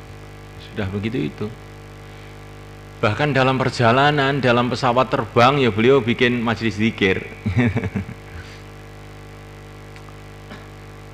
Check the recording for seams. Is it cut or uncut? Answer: uncut